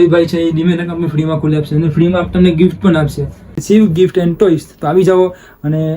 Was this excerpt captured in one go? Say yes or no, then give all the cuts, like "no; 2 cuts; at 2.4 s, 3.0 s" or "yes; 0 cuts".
no; 1 cut; at 3.5 s